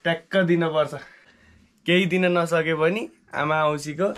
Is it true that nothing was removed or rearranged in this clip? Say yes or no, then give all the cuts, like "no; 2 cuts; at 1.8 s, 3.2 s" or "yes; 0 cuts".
no; 1 cut; at 1.3 s